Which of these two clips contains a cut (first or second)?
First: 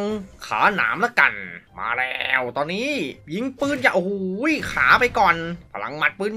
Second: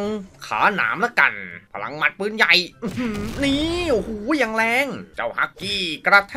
second